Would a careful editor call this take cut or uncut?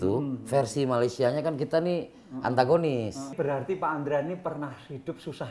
cut